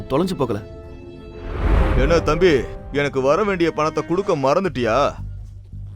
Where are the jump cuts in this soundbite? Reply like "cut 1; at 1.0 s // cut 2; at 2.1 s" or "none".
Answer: cut 1; at 1.8 s